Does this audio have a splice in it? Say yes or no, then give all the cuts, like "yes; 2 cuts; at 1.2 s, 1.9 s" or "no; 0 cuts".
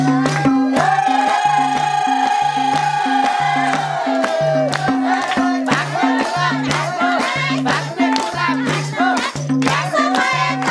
no; 0 cuts